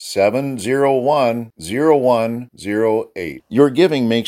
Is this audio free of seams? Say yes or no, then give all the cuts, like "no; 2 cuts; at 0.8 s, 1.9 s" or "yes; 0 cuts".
yes; 0 cuts